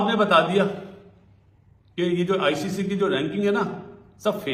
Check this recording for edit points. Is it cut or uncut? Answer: uncut